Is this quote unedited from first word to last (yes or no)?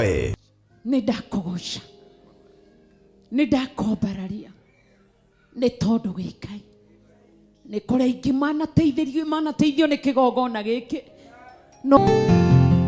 no